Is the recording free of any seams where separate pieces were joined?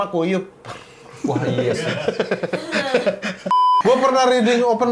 no; 1 cut; at 3.7 s

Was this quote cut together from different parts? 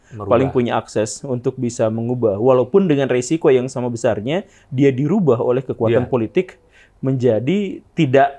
no; 0 cuts

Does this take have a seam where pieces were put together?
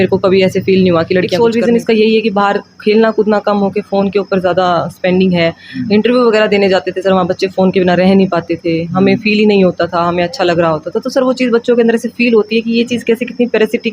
yes; 1 cut; at 1.3 s

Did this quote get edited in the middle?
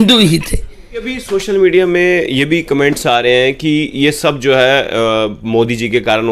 yes; 1 cut; at 1.1 s

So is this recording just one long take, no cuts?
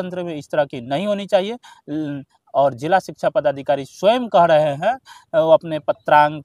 yes; 0 cuts

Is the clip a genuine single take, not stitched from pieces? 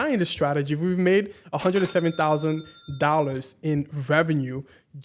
yes; 0 cuts

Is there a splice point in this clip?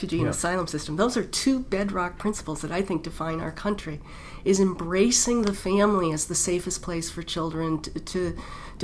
no; 0 cuts

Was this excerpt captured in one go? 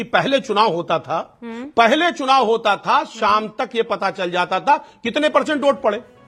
yes; 0 cuts

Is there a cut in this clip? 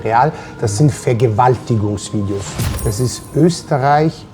yes; 1 cut; at 2.6 s

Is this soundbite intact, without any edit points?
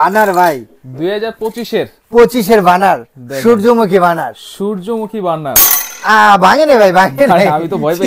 yes; 0 cuts

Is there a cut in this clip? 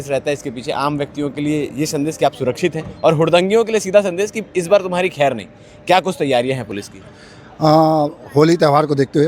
no; 0 cuts

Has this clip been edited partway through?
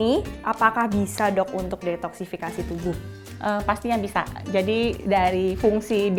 no; 0 cuts

